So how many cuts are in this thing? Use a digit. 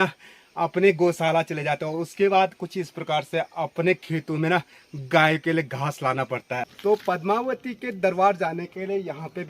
1